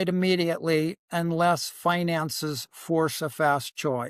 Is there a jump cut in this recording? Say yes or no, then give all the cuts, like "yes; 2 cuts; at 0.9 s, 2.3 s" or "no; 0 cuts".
no; 0 cuts